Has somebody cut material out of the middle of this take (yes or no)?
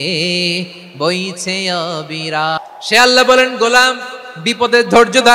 yes